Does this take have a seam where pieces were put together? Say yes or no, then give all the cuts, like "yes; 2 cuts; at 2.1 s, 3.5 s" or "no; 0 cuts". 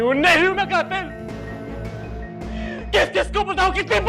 no; 0 cuts